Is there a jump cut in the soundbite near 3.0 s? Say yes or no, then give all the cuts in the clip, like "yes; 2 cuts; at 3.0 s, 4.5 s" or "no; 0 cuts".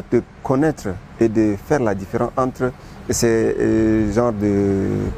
no; 0 cuts